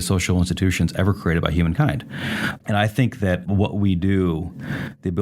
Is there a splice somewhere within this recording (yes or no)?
yes